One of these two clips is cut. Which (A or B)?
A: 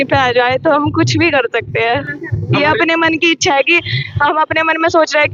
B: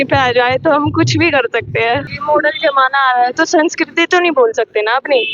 B